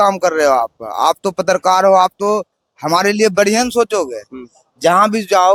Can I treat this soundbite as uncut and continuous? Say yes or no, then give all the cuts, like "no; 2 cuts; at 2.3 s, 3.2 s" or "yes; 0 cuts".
yes; 0 cuts